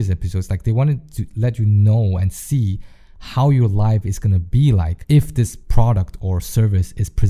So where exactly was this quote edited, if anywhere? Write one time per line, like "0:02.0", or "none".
0:05.6